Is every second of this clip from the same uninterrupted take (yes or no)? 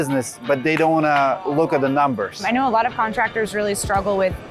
no